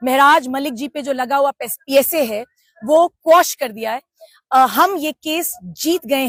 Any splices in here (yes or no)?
no